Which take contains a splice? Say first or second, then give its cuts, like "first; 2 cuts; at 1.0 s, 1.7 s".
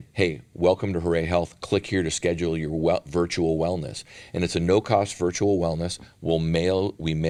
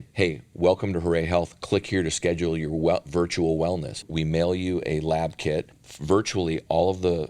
second; 2 cuts; at 4.1 s, 5.7 s